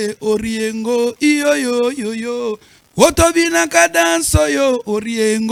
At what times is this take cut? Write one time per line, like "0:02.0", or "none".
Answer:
none